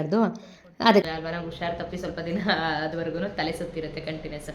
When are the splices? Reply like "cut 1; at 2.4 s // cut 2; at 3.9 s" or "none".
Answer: cut 1; at 1.0 s